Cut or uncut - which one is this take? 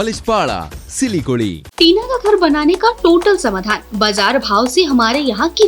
cut